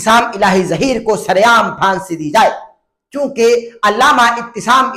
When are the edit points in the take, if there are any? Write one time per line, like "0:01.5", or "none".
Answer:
none

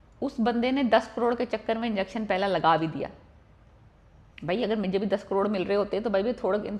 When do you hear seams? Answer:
none

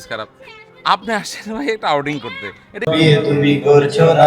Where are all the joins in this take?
0:02.9

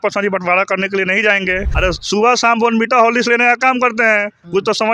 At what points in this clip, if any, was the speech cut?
0:01.7

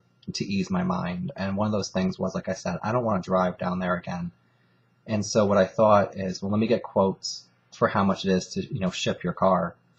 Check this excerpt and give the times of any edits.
none

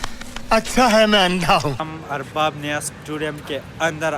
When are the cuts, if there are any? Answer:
0:01.8

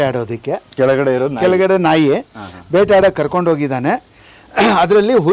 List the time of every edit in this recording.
none

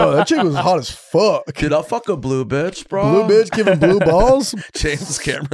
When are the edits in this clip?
0:04.5

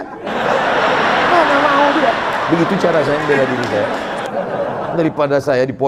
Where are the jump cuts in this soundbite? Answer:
none

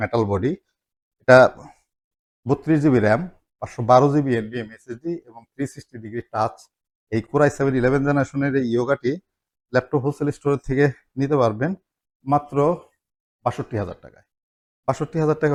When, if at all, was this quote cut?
none

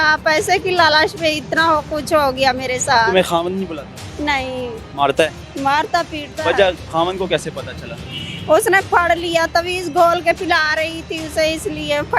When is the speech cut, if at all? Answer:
none

